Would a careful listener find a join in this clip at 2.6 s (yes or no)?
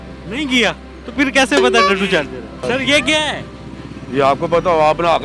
yes